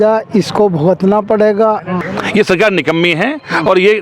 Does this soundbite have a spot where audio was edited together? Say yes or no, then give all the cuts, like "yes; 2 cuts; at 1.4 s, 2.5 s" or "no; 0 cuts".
yes; 1 cut; at 2.0 s